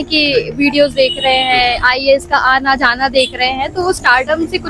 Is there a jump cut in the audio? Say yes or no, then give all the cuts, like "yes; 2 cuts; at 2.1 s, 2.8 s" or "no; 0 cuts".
no; 0 cuts